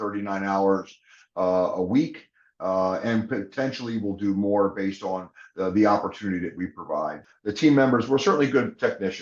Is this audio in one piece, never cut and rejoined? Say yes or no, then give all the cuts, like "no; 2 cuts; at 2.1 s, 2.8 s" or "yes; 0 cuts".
no; 1 cut; at 7.2 s